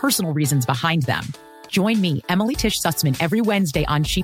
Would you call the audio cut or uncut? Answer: uncut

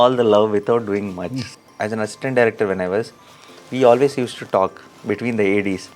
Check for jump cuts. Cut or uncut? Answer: cut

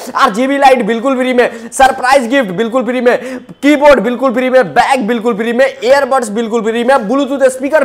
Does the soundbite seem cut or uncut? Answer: uncut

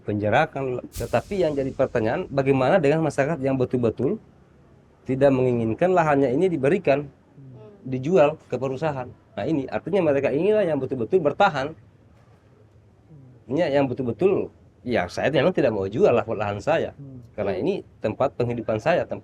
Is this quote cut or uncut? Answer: cut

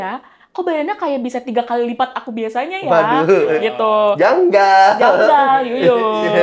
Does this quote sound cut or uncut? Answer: uncut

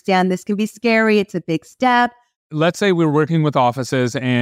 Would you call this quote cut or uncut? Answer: cut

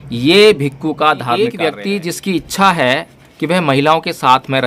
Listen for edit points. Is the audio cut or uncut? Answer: cut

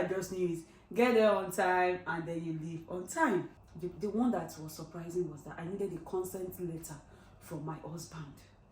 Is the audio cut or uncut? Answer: cut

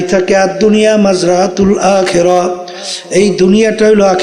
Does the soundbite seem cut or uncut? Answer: uncut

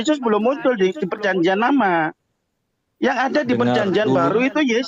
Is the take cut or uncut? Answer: uncut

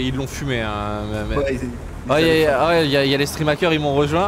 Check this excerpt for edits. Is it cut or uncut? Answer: uncut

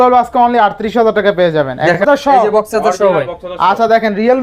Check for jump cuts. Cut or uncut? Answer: cut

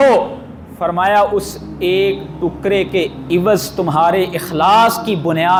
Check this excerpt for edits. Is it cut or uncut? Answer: uncut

